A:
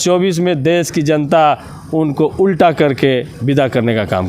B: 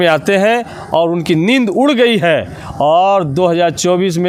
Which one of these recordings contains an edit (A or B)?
A